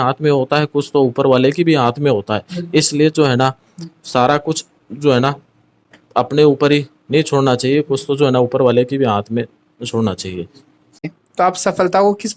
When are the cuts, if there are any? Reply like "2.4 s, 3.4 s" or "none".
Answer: 11.2 s